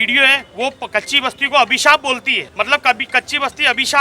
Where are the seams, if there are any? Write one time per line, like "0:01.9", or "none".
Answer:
0:02.4

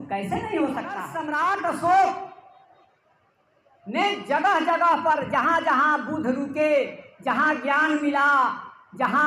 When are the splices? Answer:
0:01.1

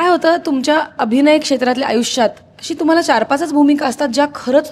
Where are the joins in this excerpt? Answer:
none

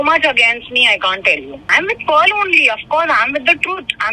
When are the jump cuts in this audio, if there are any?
0:01.7

